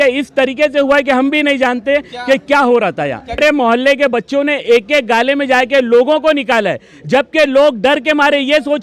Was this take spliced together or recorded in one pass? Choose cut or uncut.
cut